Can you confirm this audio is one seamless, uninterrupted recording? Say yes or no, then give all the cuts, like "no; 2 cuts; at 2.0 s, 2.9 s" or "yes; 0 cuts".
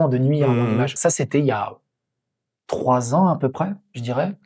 no; 1 cut; at 0.9 s